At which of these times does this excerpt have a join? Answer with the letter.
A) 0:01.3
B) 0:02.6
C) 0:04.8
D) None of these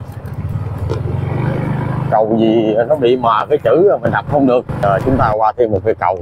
C